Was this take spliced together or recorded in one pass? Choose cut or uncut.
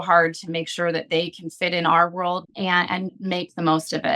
cut